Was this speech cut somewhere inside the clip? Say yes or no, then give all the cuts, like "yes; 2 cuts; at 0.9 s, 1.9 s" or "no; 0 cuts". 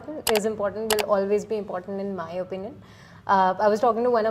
no; 0 cuts